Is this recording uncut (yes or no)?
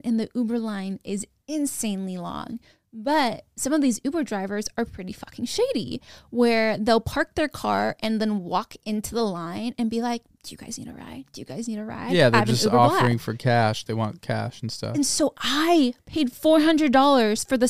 yes